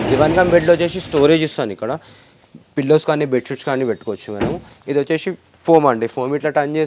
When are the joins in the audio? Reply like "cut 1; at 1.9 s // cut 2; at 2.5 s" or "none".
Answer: none